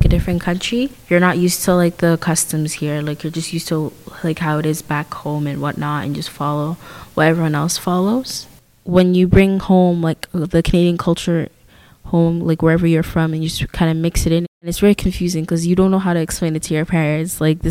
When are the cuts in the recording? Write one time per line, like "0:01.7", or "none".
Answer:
0:14.7